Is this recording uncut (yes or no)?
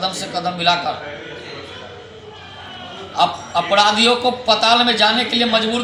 yes